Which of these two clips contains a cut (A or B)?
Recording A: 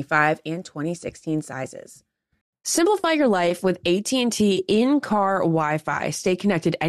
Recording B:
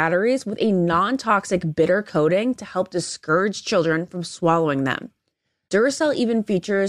A